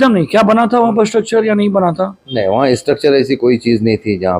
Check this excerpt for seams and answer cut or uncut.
uncut